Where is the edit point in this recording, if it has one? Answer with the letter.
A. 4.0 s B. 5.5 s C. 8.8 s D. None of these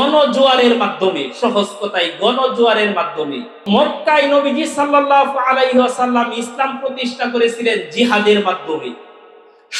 A